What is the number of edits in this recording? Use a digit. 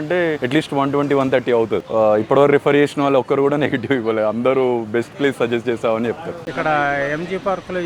2